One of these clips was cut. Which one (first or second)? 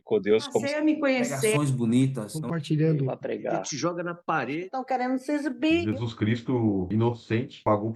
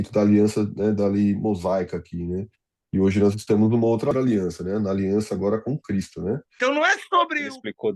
second